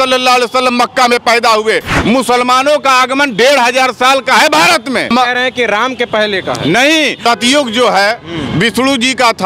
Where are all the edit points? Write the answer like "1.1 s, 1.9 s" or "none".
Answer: 1.9 s, 5.1 s, 7.2 s